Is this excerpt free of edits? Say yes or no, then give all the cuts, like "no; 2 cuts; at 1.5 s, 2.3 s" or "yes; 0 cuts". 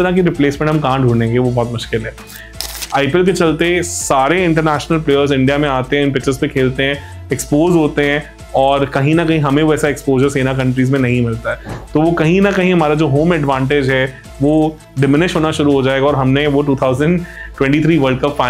no; 1 cut; at 2.6 s